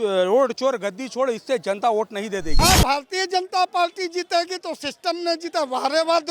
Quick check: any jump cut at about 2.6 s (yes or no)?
yes